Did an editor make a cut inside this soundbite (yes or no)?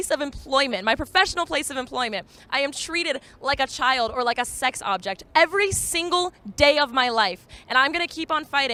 no